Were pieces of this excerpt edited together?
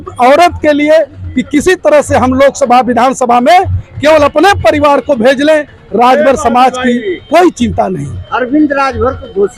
no; 0 cuts

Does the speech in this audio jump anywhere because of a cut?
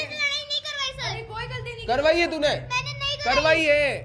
no; 0 cuts

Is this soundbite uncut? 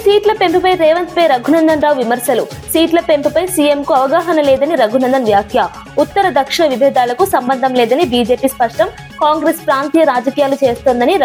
yes; 0 cuts

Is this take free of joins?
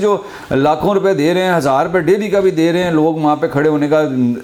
yes; 0 cuts

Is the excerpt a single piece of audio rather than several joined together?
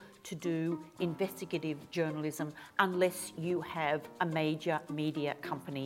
yes; 0 cuts

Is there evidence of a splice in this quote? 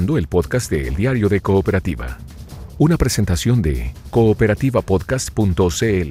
no; 0 cuts

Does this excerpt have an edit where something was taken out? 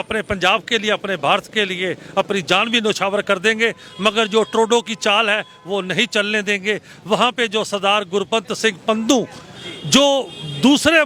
no; 0 cuts

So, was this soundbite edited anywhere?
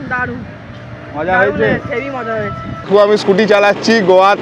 yes; 1 cut; at 2.9 s

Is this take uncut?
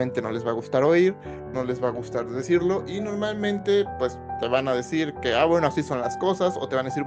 yes; 0 cuts

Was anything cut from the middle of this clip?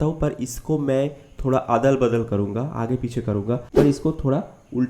yes; 1 cut; at 3.7 s

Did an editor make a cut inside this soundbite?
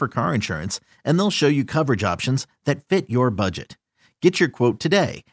no; 0 cuts

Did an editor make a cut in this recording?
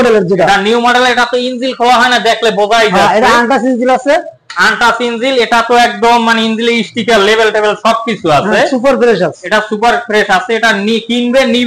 no; 0 cuts

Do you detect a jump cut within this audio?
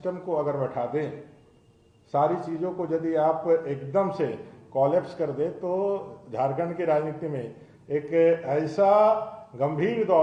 no; 0 cuts

